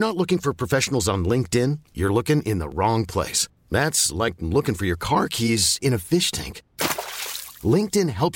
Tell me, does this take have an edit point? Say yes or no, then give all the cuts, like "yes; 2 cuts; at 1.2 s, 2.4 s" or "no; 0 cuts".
no; 0 cuts